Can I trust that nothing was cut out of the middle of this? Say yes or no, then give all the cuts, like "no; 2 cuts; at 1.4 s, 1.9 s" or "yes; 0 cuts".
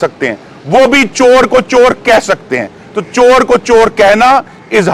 yes; 0 cuts